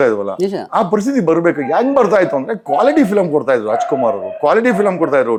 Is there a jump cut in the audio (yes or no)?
no